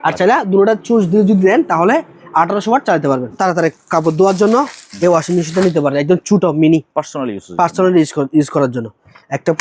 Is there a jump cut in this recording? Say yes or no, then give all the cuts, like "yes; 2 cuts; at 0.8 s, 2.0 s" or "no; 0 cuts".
yes; 1 cut; at 3.4 s